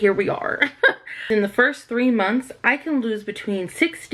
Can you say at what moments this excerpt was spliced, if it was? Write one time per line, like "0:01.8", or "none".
0:01.3